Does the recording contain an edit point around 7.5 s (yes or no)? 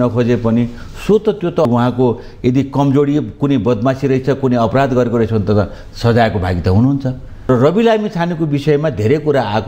yes